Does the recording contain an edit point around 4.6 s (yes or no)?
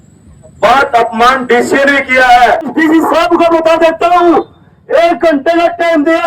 no